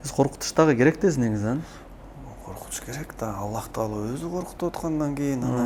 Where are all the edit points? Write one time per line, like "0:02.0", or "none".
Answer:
none